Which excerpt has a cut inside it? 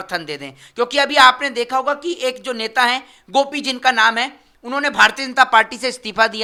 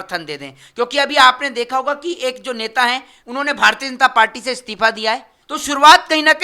second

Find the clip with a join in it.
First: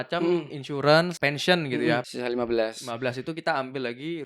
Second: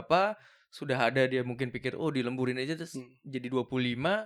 first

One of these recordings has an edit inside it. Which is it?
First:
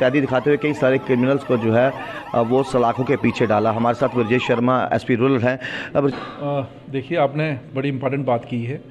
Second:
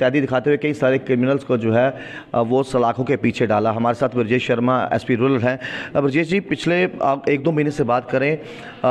first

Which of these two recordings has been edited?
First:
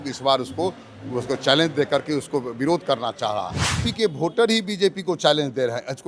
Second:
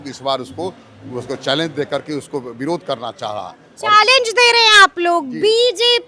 first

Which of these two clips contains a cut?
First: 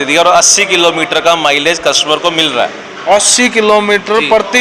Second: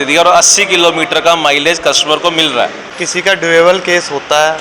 second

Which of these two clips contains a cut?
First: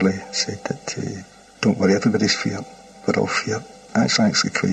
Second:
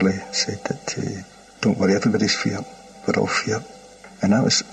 first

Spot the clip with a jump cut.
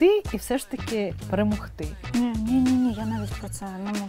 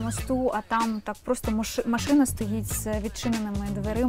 first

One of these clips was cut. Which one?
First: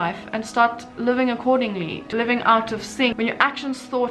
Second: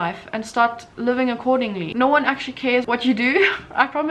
second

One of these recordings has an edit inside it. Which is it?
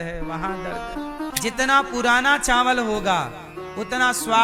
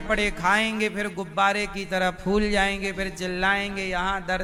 first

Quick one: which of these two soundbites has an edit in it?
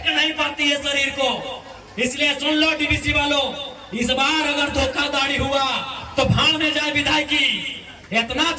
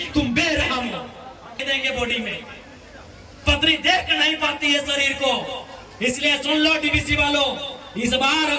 second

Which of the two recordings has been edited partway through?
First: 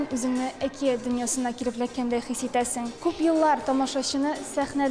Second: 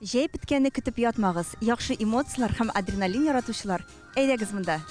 first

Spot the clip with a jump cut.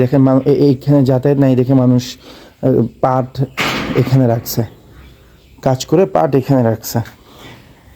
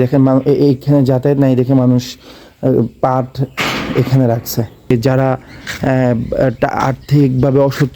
second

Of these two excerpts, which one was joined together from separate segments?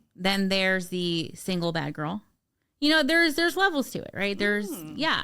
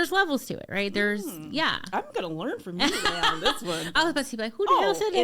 second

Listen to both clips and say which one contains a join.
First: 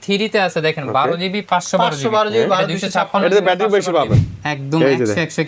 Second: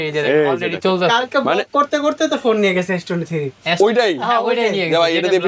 first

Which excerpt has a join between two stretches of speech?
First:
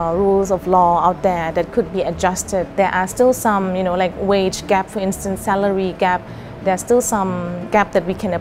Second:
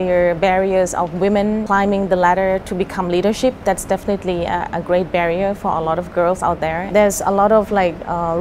second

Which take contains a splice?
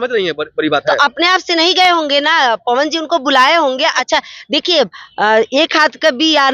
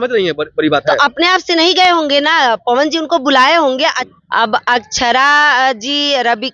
second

